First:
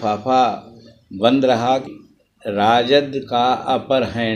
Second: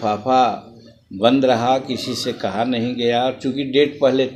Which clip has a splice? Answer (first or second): first